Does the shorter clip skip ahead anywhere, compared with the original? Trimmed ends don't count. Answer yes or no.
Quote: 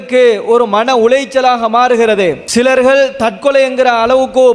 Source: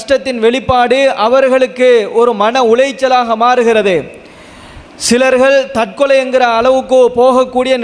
yes